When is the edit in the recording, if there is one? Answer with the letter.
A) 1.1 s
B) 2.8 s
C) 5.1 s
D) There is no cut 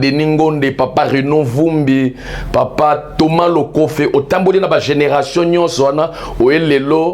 D